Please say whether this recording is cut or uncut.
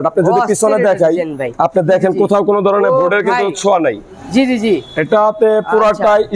uncut